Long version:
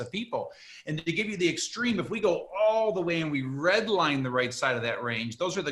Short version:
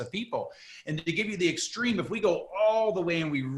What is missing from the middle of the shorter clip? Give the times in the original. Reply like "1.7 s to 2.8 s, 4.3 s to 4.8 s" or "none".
none

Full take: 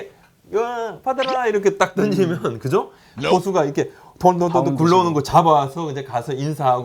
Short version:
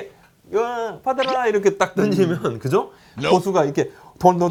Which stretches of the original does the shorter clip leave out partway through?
none

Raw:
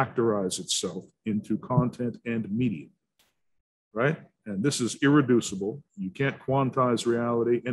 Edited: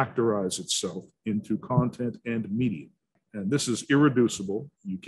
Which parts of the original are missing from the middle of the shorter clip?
3.2 s to 4.3 s

